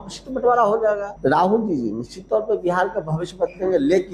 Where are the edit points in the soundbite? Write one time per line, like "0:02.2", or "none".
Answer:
0:01.1